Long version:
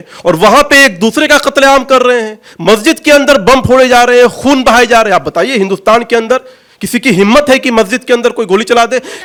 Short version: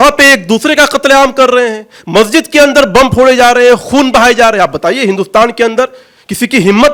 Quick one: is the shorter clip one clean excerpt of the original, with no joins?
yes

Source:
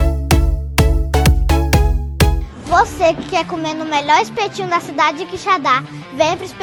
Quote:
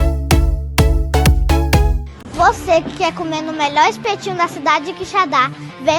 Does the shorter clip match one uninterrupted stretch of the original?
no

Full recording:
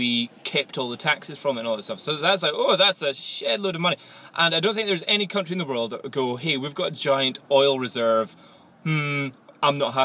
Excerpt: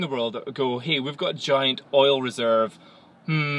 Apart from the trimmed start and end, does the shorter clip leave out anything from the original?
no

